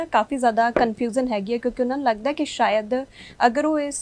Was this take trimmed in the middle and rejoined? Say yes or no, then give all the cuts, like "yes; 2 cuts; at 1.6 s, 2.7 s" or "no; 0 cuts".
no; 0 cuts